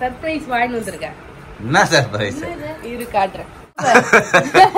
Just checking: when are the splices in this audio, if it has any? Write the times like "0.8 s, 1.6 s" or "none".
3.8 s